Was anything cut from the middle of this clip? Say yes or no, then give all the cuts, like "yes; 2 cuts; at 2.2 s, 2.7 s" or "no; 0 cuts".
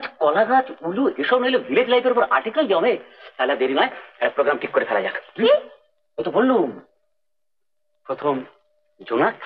no; 0 cuts